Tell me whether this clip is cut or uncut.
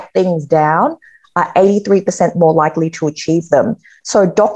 uncut